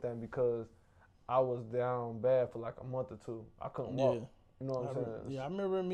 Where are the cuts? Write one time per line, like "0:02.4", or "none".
none